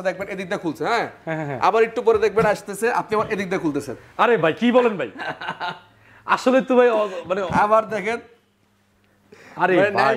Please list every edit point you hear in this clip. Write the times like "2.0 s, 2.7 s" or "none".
none